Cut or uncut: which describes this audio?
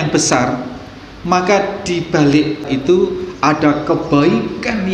cut